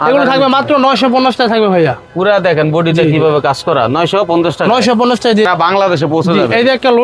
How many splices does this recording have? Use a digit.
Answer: 1